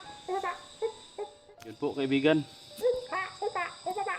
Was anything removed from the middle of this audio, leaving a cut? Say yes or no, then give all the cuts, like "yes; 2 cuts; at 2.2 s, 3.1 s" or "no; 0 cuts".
yes; 1 cut; at 1.4 s